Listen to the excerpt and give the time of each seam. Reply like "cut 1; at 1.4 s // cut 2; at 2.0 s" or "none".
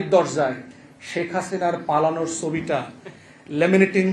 none